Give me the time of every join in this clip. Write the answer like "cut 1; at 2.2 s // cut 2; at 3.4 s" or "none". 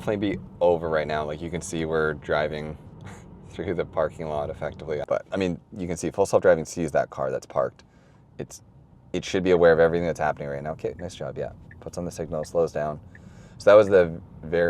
cut 1; at 5.1 s

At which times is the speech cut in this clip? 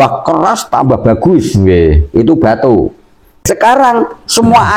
cut 1; at 3.4 s

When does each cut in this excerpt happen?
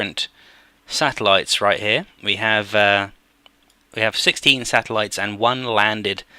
cut 1; at 1.1 s

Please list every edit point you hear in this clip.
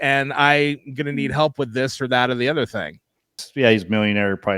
cut 1; at 3.3 s

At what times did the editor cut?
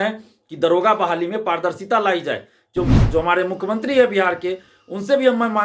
cut 1; at 2.9 s

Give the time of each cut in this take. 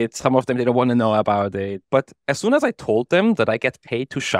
cut 1; at 1.8 s

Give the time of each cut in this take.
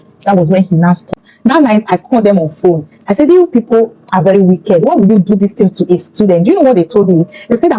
cut 1; at 1.2 s

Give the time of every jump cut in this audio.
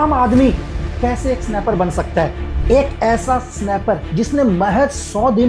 cut 1; at 2.5 s

